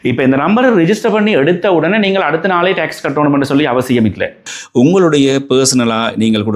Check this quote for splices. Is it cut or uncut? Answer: cut